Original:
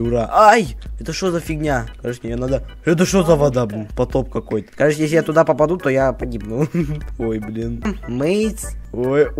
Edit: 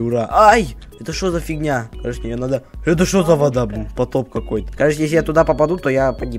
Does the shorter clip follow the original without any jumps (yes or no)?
yes